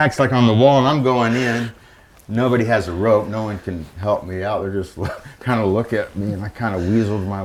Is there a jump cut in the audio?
no; 0 cuts

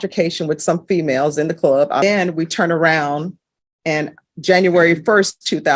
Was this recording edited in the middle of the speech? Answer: yes; 1 cut; at 2.0 s

